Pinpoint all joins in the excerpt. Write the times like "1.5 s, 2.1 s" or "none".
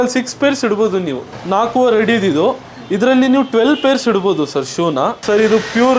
1.2 s, 5.2 s

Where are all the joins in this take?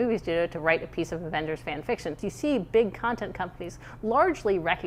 2.2 s

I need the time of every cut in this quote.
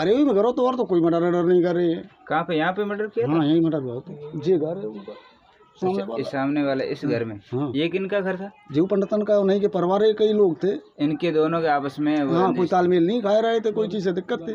none

